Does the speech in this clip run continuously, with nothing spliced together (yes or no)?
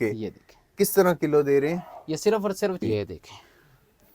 no